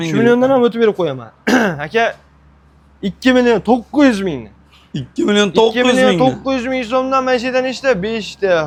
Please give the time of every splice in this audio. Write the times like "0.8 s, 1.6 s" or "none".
none